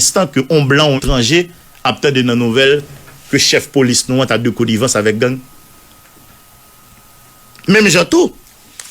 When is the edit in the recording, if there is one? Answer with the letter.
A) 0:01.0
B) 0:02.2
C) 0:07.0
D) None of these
A